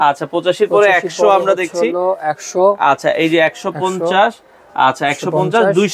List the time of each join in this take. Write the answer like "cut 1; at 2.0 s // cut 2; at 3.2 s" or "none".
none